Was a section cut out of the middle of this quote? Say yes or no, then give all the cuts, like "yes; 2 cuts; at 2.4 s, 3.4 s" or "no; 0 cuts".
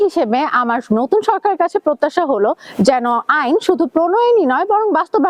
no; 0 cuts